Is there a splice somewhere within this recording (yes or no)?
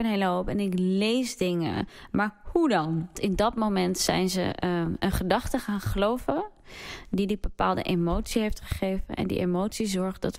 yes